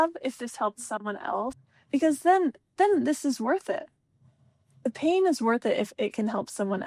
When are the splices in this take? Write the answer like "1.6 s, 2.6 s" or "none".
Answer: 1.7 s